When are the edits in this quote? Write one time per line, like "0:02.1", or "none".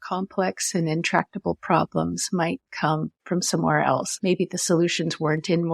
0:03.1
0:04.1